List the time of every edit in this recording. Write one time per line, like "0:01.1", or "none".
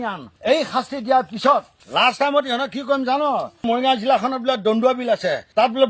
0:01.7
0:03.6